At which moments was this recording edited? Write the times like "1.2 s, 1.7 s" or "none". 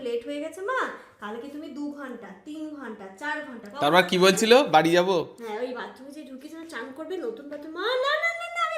none